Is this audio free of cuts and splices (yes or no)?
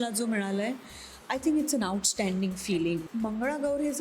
no